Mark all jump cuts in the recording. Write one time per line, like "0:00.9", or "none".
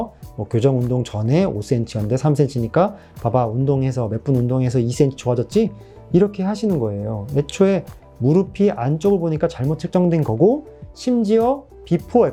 none